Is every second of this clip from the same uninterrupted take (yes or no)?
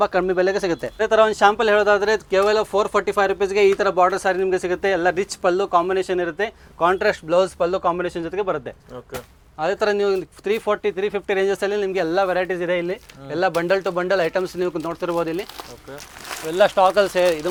yes